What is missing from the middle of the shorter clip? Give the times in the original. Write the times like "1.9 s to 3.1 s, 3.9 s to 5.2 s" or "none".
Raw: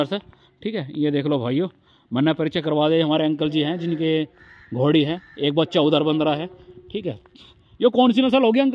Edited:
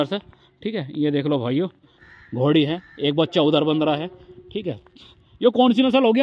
2.0 s to 4.4 s